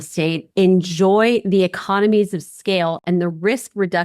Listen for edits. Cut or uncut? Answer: uncut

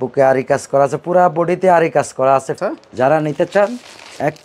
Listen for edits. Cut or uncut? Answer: cut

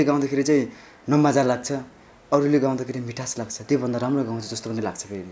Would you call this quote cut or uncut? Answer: uncut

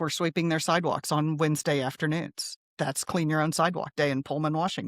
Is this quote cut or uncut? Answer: uncut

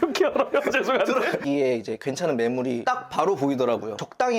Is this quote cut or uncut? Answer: cut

